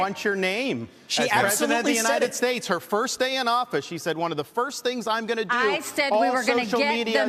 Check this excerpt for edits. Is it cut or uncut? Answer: uncut